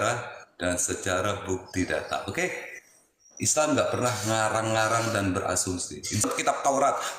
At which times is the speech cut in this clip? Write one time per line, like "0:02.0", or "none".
0:06.2